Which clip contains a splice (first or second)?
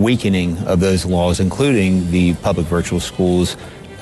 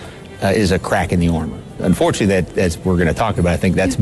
second